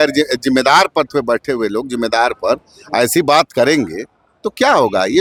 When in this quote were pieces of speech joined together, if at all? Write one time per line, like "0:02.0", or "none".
none